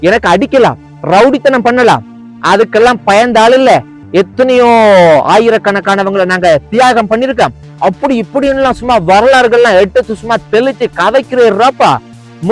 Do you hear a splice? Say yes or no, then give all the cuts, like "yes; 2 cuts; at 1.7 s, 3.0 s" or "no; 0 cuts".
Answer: no; 0 cuts